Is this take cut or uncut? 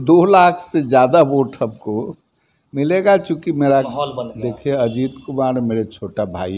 cut